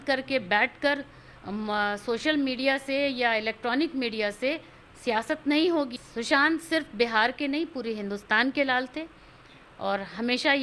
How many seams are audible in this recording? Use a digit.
1